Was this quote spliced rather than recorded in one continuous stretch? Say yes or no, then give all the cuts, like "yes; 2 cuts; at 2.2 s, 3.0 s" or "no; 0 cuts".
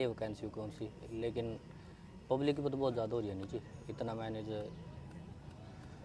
no; 0 cuts